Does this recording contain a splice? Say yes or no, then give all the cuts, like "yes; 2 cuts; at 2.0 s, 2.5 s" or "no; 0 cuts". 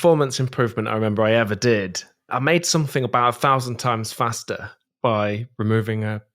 yes; 1 cut; at 2.2 s